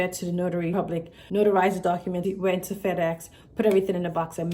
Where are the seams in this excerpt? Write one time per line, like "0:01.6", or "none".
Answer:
0:00.8
0:02.3